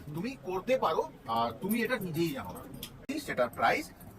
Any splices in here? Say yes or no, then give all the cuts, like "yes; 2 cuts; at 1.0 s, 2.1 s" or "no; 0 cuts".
yes; 1 cut; at 3.1 s